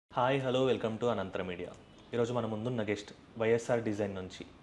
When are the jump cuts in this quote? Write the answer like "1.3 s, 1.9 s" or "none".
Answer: none